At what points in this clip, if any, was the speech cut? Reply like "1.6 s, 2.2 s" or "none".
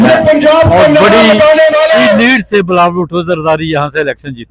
none